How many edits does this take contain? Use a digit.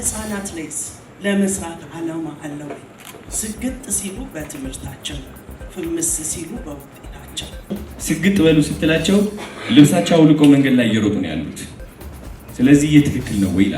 1